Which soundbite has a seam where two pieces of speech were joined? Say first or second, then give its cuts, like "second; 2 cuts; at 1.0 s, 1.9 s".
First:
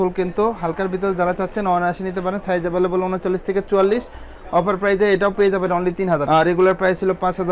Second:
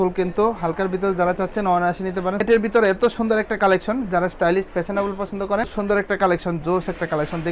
second; 2 cuts; at 2.4 s, 5.7 s